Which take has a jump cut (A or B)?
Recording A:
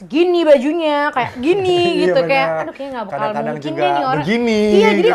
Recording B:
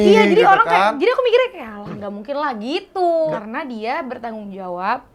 B